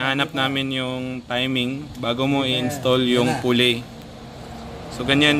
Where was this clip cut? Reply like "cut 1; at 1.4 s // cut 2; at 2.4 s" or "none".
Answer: none